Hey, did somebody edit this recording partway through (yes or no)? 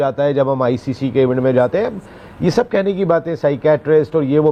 no